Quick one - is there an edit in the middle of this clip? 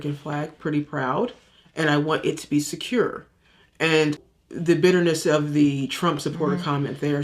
yes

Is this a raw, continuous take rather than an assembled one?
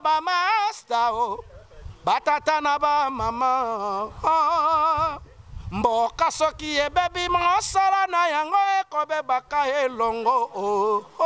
yes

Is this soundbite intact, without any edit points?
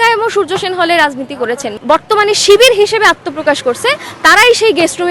no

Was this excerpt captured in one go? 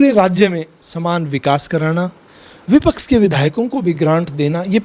yes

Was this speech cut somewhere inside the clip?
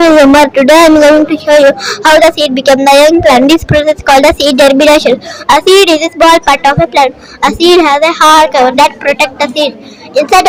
no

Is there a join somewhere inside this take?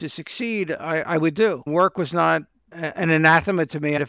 yes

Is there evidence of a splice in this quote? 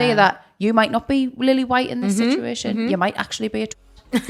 no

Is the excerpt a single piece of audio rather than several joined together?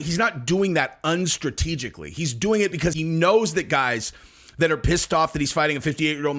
no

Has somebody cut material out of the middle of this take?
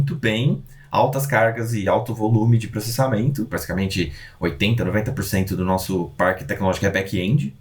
yes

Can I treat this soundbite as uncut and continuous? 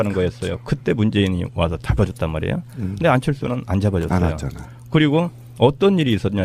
yes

